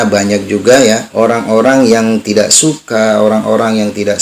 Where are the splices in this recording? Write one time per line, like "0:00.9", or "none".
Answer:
0:01.1